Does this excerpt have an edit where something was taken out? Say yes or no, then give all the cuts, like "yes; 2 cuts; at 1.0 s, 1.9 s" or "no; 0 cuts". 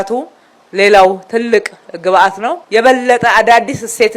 yes; 1 cut; at 2.5 s